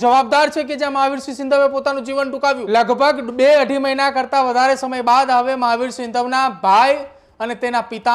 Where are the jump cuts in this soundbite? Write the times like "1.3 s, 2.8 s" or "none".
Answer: 2.6 s